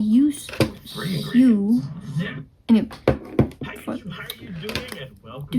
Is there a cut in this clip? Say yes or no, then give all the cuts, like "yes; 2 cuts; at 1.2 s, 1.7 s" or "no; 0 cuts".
no; 0 cuts